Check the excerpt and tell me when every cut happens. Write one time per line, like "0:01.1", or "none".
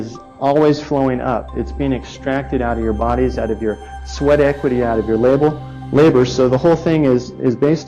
none